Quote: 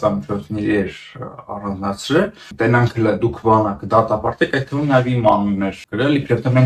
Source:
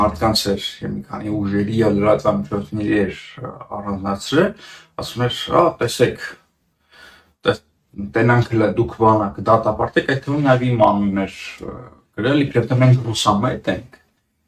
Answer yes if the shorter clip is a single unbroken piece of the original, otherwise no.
no